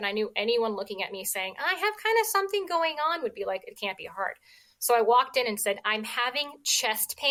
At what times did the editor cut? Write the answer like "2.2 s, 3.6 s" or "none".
none